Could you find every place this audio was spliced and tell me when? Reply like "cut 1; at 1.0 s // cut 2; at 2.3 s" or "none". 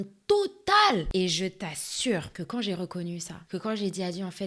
cut 1; at 1.1 s // cut 2; at 2.3 s // cut 3; at 3.3 s